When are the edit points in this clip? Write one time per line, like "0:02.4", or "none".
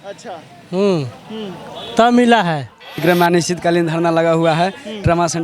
0:03.0